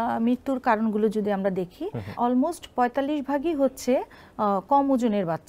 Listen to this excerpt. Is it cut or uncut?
cut